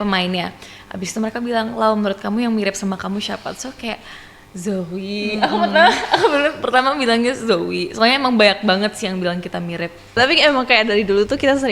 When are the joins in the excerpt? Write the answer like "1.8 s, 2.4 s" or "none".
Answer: 10.2 s